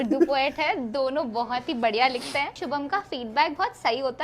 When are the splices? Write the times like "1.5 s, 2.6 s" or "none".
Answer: 2.6 s